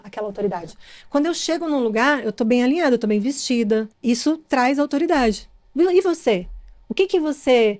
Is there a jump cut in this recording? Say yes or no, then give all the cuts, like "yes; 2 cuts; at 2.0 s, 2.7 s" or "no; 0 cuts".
yes; 1 cut; at 3.9 s